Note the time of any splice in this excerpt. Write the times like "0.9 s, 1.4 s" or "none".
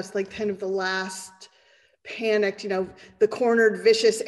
none